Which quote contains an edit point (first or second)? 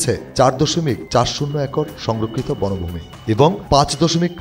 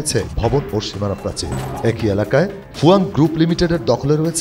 second